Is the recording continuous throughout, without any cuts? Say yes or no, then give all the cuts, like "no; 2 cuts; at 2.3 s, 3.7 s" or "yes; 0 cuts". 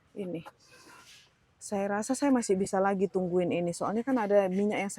yes; 0 cuts